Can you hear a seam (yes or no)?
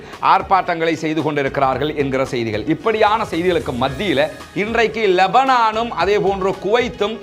yes